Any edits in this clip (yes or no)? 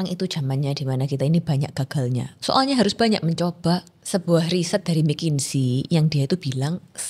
yes